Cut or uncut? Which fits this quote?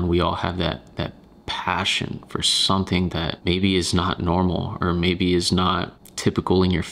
uncut